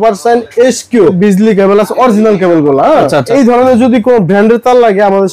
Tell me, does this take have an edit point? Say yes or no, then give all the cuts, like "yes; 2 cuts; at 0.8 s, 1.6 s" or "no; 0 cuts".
yes; 2 cuts; at 1.1 s, 3.3 s